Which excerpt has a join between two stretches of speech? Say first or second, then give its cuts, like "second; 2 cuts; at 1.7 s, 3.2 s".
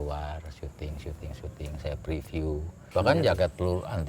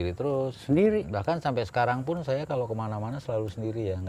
first; 1 cut; at 2.9 s